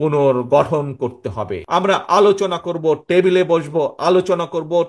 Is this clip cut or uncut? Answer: cut